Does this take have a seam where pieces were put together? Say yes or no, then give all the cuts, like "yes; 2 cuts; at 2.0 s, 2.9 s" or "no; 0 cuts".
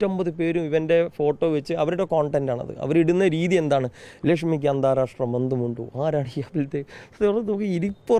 no; 0 cuts